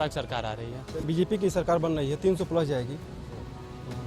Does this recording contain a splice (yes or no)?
yes